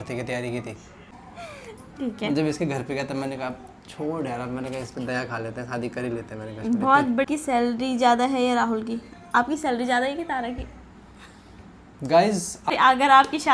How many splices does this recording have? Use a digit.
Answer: 3